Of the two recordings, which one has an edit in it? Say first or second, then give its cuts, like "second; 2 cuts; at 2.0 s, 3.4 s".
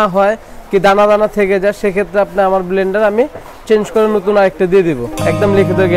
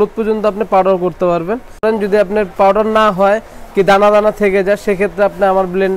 second; 1 cut; at 1.8 s